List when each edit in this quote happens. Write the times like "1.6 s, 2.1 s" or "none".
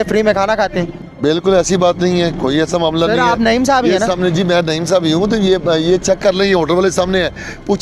1.0 s